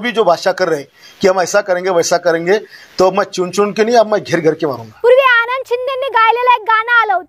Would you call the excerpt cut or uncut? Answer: cut